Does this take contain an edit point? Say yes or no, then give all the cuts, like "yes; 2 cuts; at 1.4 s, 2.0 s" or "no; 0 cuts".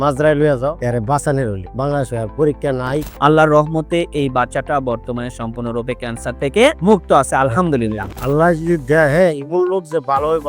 yes; 3 cuts; at 0.8 s, 3.1 s, 8.1 s